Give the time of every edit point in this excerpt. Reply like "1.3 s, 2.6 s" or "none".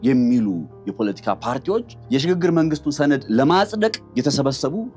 2.0 s, 4.0 s